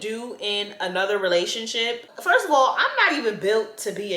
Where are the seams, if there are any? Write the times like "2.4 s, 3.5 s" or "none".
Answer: 2.1 s